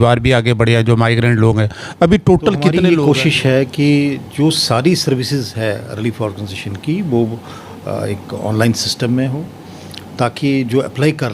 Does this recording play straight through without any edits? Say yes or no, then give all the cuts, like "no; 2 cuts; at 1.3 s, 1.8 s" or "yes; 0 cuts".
no; 1 cut; at 2.8 s